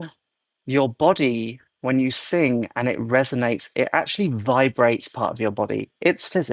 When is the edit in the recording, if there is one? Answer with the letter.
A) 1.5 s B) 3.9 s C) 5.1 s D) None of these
D